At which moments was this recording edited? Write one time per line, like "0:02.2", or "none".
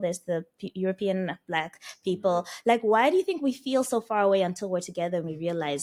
none